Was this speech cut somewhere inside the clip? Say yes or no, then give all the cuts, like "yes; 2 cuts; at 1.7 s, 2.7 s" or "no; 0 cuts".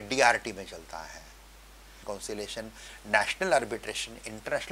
yes; 1 cut; at 1.9 s